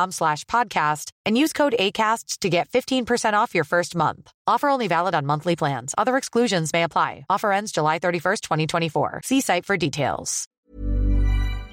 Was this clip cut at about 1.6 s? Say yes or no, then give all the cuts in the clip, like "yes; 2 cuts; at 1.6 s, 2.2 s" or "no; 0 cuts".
no; 1 cut; at 10.6 s